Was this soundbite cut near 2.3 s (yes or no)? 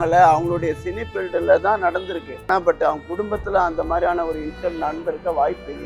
yes